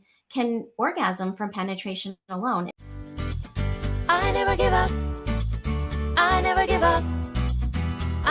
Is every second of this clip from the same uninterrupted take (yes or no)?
no